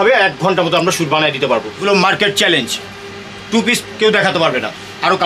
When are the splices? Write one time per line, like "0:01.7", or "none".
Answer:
0:01.8